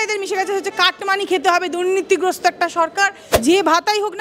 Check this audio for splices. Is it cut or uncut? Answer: cut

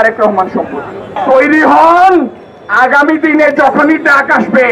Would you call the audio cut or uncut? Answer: cut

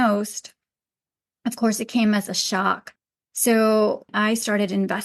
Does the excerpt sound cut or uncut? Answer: cut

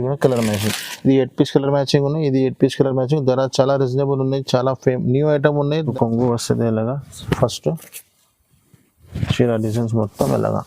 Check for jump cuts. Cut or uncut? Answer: cut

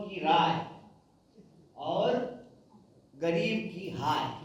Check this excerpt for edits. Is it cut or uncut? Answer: uncut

